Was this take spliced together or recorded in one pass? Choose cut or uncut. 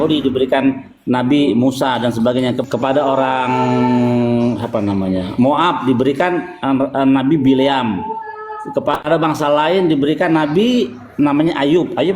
cut